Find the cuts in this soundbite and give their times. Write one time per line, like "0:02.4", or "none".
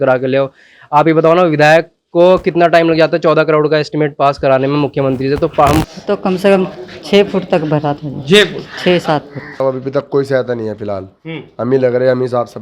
0:05.8
0:09.6

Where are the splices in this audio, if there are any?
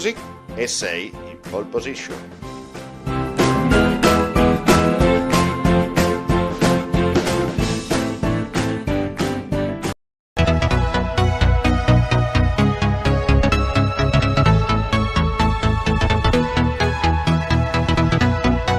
0:10.0

